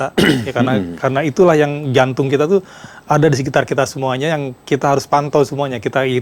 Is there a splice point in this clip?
no; 0 cuts

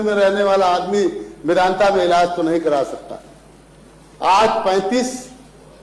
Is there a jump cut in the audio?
no; 0 cuts

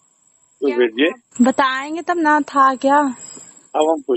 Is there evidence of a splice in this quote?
no; 0 cuts

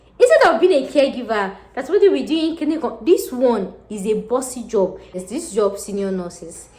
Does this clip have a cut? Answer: yes; 1 cut; at 5.2 s

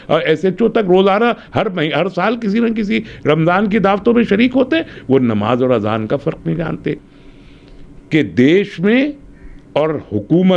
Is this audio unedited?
no; 1 cut; at 7.1 s

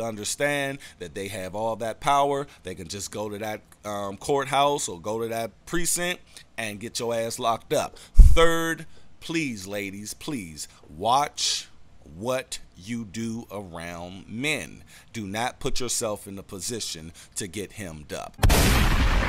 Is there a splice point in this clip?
yes; 1 cut; at 18.3 s

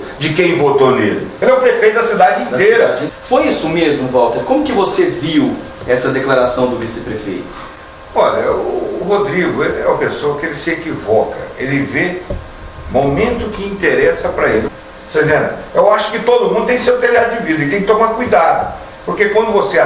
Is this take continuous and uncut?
no; 2 cuts; at 3.1 s, 14.7 s

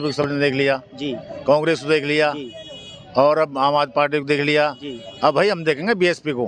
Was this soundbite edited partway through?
no; 0 cuts

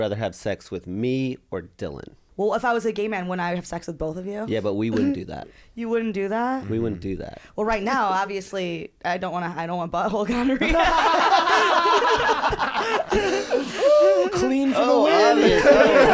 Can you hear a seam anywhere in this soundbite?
yes; 1 cut; at 2.2 s

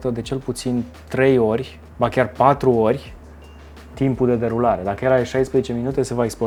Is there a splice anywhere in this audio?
no; 0 cuts

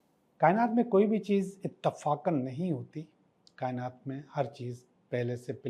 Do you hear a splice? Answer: no; 0 cuts

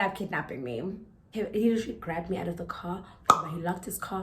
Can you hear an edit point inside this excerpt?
yes; 1 cut; at 1.1 s

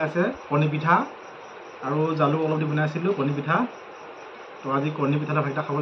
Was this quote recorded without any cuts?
yes; 0 cuts

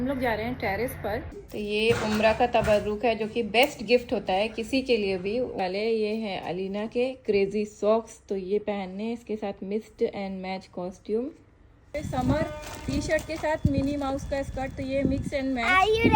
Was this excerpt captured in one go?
no; 3 cuts; at 1.3 s, 5.6 s, 11.9 s

